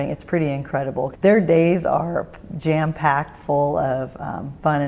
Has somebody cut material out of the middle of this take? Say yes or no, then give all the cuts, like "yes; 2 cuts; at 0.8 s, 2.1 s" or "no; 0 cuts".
yes; 1 cut; at 1.1 s